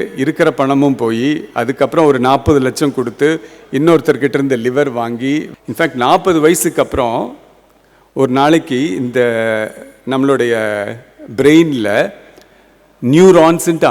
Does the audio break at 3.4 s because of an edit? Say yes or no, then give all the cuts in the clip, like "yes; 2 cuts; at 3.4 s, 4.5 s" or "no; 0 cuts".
no; 1 cut; at 5.5 s